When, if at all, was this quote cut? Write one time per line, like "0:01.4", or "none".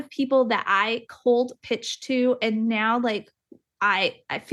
none